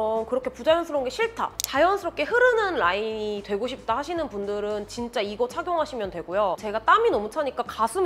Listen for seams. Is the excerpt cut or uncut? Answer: cut